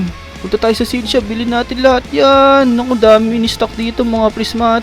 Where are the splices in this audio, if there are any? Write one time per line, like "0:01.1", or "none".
none